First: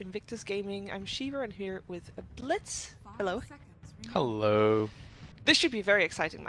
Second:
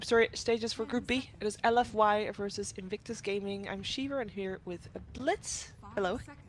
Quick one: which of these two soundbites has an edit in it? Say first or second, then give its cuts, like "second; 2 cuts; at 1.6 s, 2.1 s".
second; 1 cut; at 1.3 s